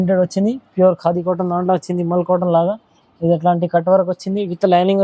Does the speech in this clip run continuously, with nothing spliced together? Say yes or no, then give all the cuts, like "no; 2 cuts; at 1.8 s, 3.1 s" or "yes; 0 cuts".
yes; 0 cuts